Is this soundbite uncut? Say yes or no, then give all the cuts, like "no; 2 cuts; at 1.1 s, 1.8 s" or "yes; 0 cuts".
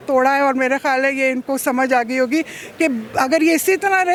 yes; 0 cuts